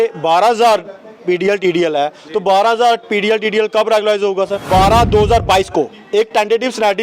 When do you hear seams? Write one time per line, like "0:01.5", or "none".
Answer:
0:04.6

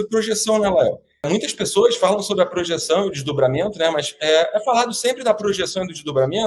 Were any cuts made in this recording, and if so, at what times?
0:01.3

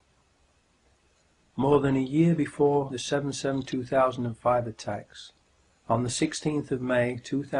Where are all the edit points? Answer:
none

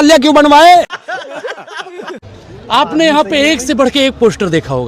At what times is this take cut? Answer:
0:01.0
0:02.3

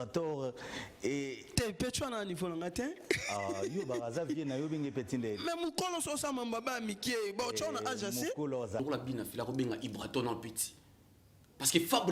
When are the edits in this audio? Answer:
0:08.8

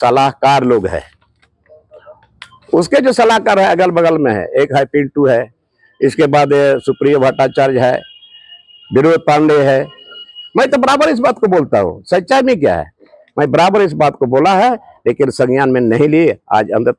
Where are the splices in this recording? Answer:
none

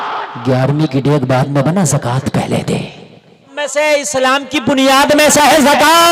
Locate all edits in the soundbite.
0:03.4

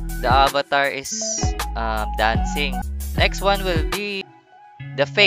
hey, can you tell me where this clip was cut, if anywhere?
0:02.8
0:04.2

